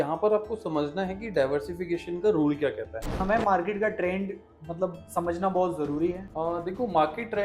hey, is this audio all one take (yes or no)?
no